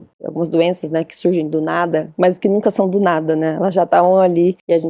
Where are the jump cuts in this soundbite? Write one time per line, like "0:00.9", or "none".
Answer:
none